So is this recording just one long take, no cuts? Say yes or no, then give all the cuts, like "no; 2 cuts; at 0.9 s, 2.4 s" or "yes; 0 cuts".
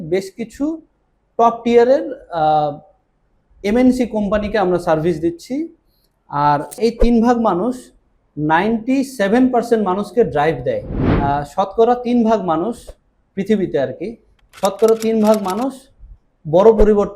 no; 2 cuts; at 6.8 s, 11.1 s